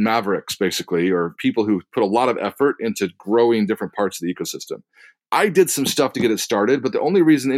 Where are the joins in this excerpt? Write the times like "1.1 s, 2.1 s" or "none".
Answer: 1.4 s, 5.1 s